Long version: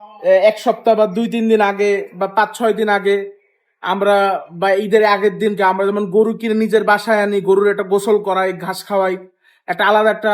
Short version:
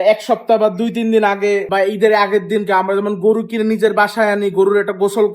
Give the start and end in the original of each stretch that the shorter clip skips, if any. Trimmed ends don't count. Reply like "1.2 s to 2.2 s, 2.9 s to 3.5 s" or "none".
2.0 s to 4.6 s